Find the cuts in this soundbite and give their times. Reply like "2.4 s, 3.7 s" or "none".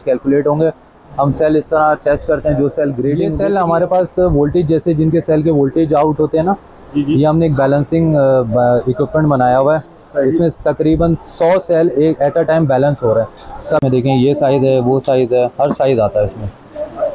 3.3 s, 13.8 s

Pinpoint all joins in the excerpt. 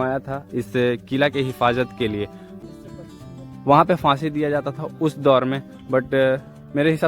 2.6 s

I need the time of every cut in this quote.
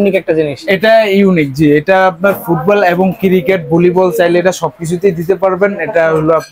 none

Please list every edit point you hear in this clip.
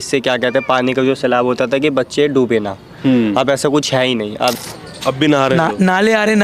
4.6 s

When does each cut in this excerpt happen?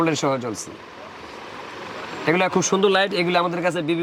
none

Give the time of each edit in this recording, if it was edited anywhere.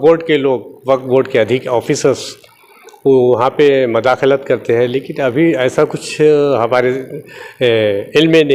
none

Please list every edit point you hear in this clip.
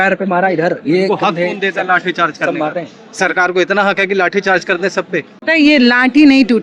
5.4 s

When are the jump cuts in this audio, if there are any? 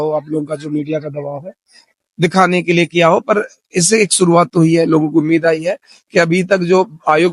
none

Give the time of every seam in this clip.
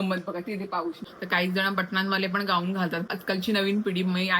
1.1 s, 3.1 s

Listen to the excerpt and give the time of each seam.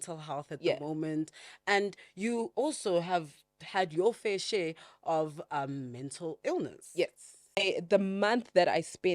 7.6 s

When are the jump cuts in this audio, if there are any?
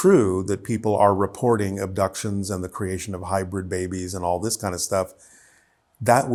none

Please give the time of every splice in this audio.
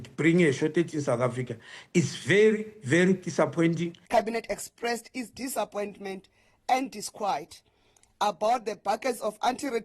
4.0 s

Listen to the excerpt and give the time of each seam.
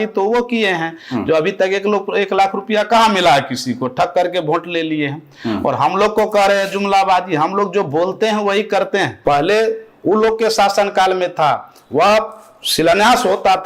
9.1 s

